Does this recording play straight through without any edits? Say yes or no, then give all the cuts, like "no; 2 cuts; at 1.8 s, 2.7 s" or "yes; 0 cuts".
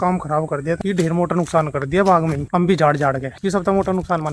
no; 3 cuts; at 0.8 s, 2.4 s, 3.3 s